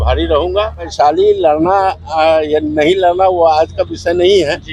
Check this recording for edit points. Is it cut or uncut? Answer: cut